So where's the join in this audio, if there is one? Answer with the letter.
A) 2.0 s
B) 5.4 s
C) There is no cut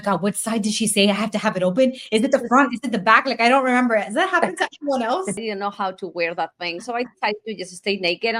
B